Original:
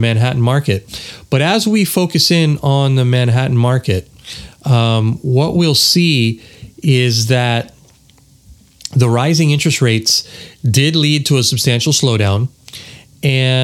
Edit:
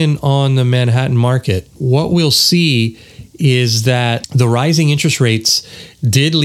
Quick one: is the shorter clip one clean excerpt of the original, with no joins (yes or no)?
no